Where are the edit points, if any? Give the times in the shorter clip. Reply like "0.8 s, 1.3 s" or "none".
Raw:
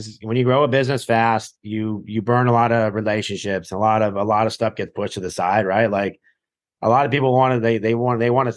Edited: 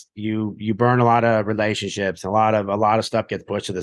none